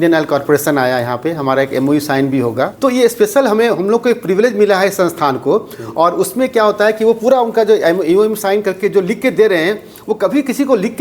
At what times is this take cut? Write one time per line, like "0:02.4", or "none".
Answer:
none